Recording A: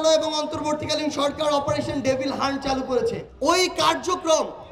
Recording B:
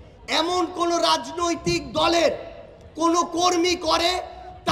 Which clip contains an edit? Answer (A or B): A